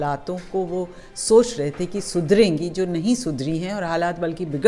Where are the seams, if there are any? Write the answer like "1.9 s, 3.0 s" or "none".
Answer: none